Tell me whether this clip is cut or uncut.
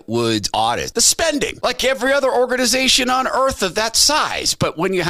cut